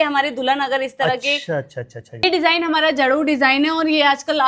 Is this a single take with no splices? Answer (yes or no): no